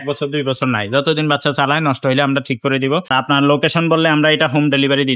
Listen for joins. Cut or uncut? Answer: cut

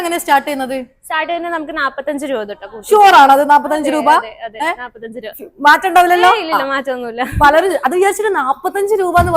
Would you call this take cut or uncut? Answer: uncut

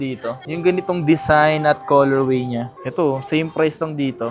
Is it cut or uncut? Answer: cut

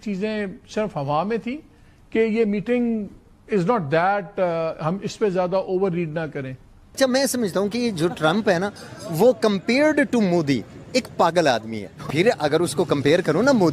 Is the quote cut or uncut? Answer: cut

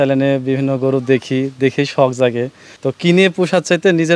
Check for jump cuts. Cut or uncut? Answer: cut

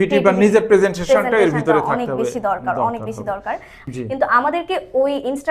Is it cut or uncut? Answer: cut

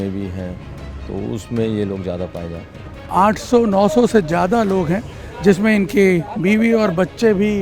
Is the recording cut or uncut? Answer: cut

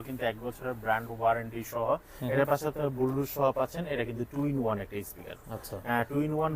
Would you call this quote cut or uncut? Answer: uncut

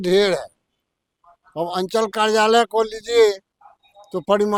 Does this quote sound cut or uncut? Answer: uncut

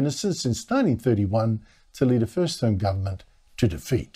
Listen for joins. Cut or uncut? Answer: cut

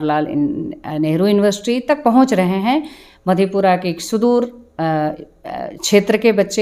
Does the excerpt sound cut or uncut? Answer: uncut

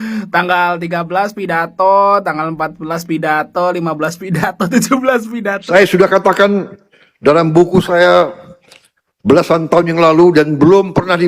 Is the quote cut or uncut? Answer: cut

